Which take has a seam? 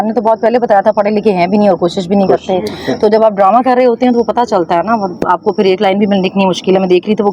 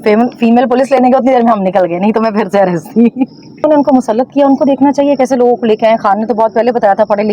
second; 1 cut; at 3.6 s

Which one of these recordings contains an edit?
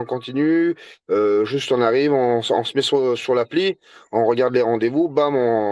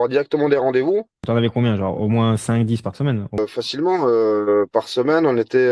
second; 2 cuts; at 1.2 s, 3.4 s

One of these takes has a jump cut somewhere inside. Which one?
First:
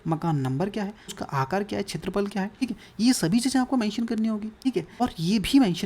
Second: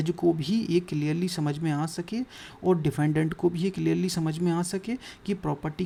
first; 3 cuts; at 1.2 s, 2.6 s, 5.0 s

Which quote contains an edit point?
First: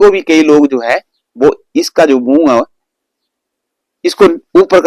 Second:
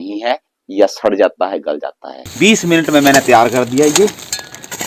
second; 1 cut; at 2.3 s

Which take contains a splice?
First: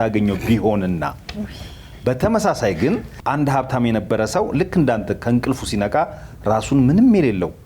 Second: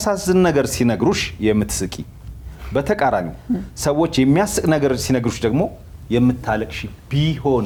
first; 1 cut; at 3.1 s

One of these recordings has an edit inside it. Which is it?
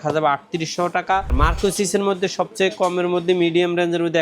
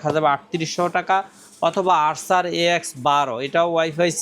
first; 1 cut; at 1.3 s

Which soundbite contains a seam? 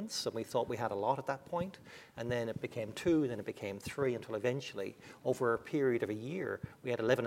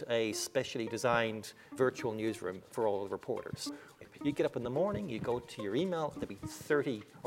second; 2 cuts; at 1.7 s, 3.6 s

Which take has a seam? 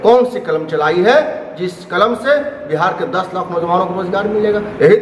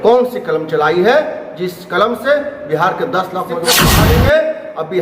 second; 1 cut; at 3.7 s

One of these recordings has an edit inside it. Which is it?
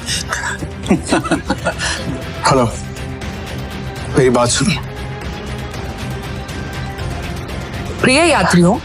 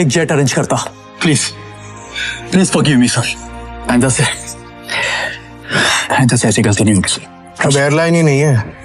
first; 2 cuts; at 1.9 s, 5.7 s

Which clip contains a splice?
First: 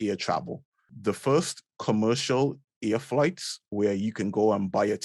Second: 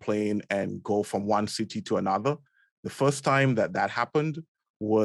first; 1 cut; at 0.9 s

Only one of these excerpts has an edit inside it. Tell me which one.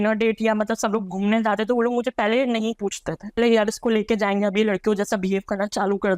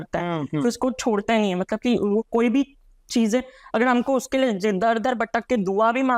first; 1 cut; at 3.4 s

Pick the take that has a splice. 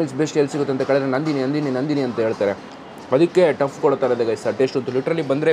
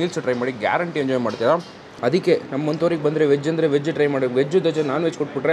second; 1 cut; at 1.8 s

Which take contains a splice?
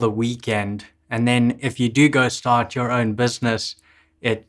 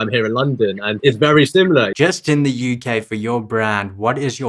second; 2 cuts; at 1.0 s, 1.9 s

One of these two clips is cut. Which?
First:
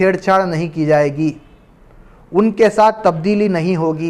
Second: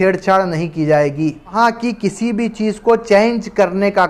second; 1 cut; at 1.5 s

